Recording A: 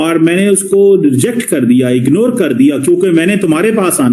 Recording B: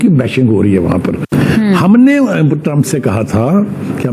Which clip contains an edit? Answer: B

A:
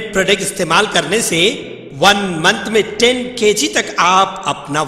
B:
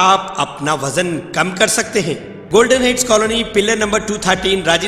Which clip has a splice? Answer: B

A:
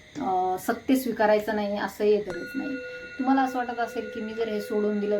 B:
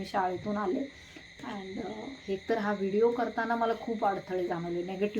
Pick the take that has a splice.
A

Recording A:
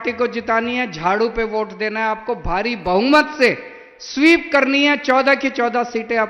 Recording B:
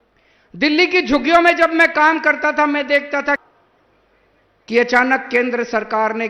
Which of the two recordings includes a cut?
B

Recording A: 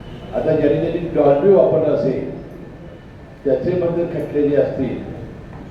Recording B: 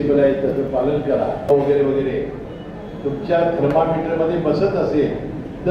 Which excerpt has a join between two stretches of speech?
B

